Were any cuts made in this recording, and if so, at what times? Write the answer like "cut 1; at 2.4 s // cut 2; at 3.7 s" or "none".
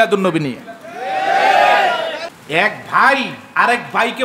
cut 1; at 2.2 s